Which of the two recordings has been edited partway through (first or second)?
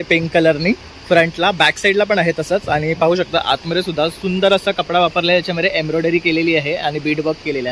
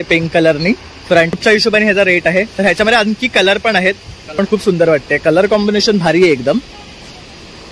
second